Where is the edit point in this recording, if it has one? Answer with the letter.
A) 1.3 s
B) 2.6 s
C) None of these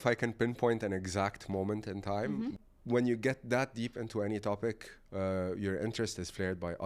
B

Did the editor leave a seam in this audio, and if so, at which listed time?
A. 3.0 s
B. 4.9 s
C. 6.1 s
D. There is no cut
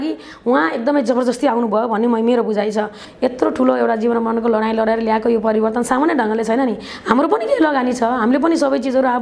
A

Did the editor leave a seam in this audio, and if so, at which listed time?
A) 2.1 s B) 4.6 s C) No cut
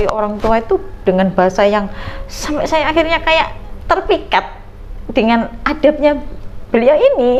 C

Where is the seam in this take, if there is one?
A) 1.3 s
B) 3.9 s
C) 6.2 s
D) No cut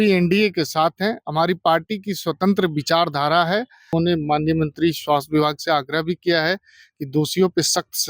B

